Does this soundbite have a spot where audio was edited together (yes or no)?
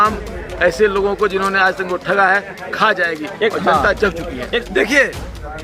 yes